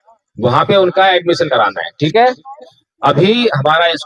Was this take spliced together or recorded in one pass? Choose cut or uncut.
uncut